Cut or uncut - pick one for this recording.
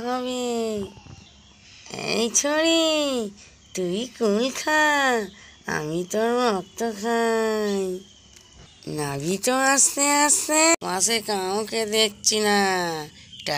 cut